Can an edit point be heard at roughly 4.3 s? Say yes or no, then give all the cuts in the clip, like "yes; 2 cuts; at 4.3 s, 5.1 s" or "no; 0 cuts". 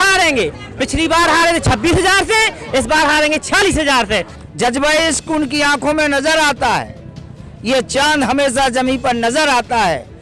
yes; 1 cut; at 4.3 s